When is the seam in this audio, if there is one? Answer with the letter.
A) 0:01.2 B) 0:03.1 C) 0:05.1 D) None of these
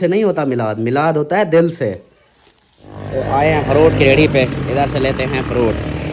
B